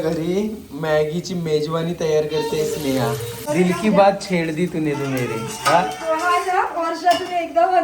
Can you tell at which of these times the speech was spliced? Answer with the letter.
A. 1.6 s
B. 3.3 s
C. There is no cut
B